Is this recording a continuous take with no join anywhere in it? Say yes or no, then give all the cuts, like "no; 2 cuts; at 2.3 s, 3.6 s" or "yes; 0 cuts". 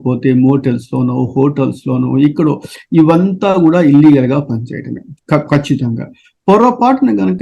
yes; 0 cuts